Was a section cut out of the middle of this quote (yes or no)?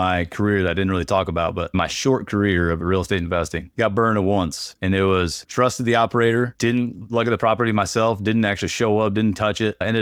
no